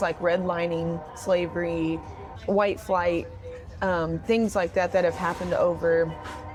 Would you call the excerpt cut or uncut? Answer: uncut